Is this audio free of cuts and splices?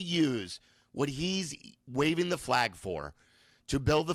yes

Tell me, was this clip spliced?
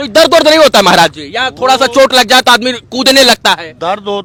no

